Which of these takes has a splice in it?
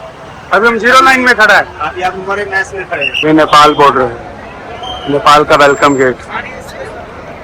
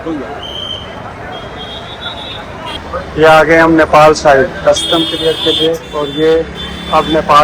first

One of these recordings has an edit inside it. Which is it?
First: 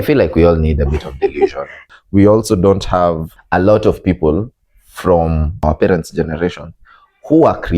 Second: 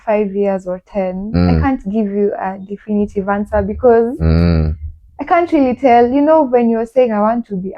first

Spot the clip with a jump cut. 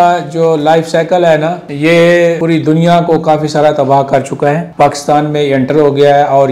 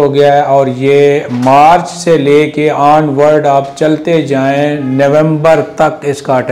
first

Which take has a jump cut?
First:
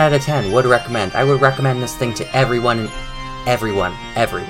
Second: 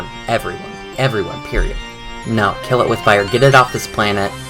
second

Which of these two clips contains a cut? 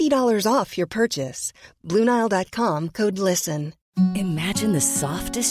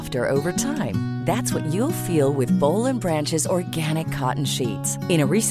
first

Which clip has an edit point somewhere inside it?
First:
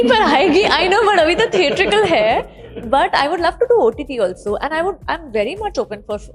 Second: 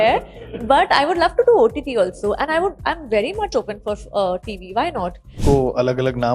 second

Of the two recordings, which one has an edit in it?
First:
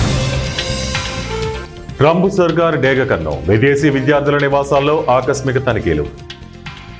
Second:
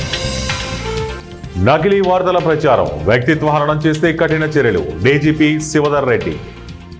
first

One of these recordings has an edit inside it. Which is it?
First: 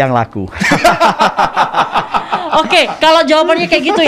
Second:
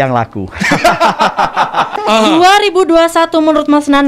second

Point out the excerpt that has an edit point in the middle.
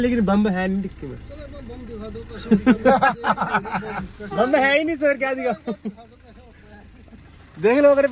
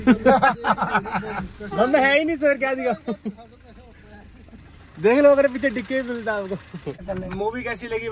second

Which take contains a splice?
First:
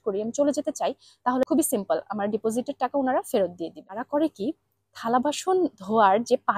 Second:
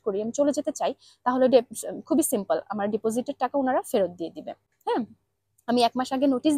first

